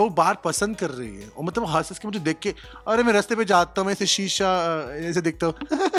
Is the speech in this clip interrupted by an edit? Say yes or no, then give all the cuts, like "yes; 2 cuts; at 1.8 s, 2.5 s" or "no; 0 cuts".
no; 0 cuts